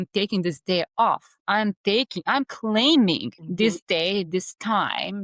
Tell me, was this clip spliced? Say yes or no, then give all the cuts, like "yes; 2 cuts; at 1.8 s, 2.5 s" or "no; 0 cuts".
yes; 1 cut; at 3.4 s